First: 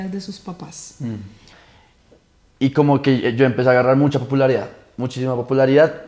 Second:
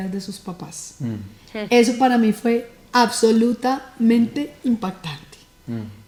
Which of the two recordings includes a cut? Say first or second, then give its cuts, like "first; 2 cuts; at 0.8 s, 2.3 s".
first; 1 cut; at 1.5 s